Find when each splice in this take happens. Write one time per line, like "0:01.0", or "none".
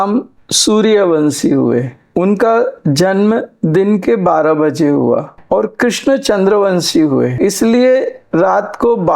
0:05.3
0:07.4

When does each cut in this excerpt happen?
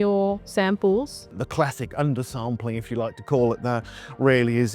0:01.2

